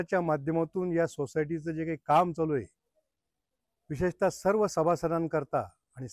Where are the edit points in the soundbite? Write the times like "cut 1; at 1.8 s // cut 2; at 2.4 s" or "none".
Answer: none